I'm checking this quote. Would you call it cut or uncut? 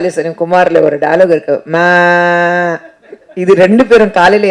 uncut